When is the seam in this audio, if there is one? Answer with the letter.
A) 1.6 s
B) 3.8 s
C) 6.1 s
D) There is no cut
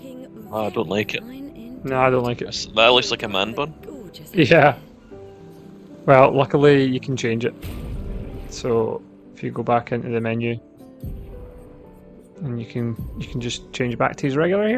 D